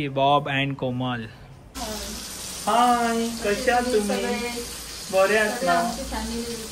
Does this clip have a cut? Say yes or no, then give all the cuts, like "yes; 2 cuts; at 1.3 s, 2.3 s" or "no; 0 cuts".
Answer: yes; 1 cut; at 1.6 s